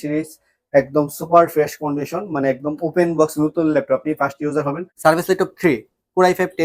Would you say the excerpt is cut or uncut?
cut